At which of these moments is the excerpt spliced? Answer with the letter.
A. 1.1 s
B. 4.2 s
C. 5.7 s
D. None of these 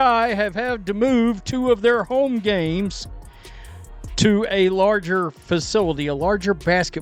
D